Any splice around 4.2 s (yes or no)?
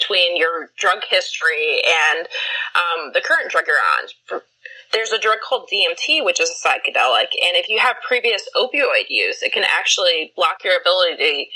no